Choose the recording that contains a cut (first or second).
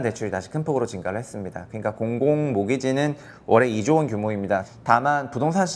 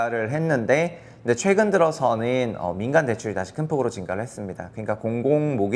first